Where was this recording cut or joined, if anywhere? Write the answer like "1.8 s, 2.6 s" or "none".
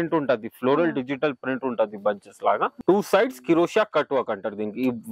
2.7 s